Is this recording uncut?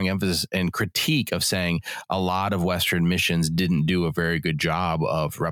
yes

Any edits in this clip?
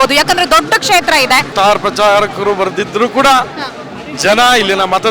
yes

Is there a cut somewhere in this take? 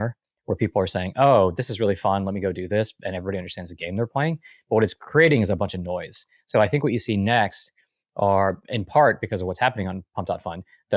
no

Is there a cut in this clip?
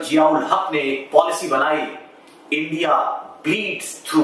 no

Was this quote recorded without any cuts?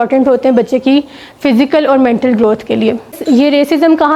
no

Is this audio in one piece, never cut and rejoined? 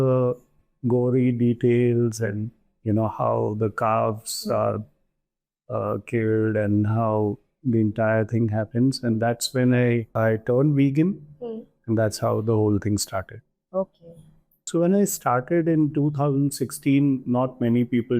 no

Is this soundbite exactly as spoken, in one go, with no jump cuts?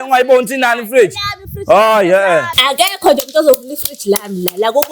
no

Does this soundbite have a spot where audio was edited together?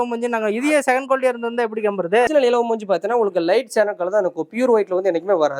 yes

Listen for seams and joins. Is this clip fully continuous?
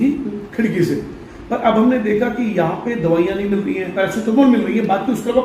no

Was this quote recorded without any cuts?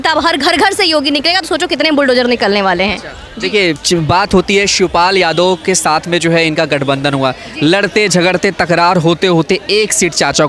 yes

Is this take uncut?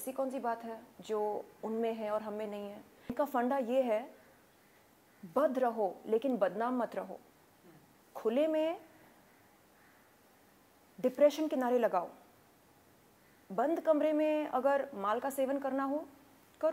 no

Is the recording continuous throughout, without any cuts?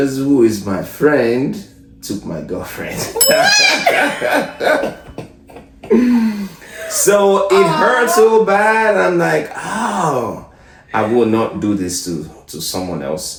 yes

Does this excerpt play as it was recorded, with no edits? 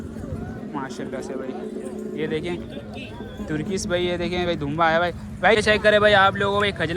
no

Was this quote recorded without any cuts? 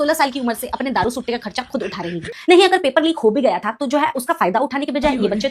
no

